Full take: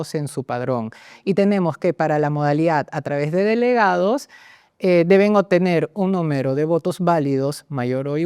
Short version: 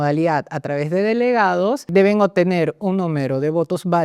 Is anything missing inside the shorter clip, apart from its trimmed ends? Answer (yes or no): yes